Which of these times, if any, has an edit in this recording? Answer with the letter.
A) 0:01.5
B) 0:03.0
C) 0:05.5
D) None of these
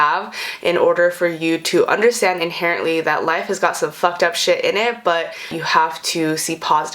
C